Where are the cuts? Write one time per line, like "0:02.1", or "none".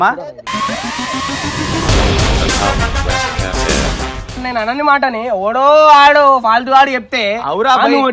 0:04.4